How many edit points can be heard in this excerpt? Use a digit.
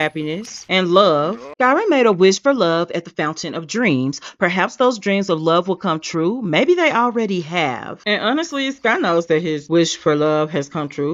0